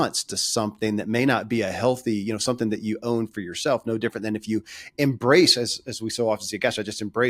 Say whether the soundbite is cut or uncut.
uncut